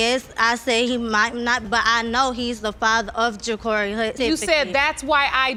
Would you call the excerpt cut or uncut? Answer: uncut